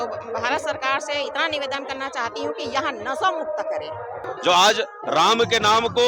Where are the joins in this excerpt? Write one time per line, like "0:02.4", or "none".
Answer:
0:04.2